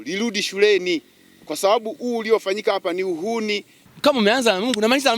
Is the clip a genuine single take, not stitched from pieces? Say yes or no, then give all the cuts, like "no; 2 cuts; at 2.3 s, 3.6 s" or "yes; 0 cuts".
no; 1 cut; at 3.8 s